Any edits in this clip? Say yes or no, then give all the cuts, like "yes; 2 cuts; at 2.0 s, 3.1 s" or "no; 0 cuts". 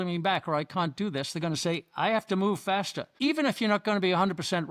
yes; 1 cut; at 3.0 s